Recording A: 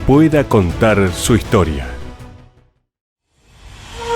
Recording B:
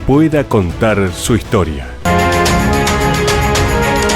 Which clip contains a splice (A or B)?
B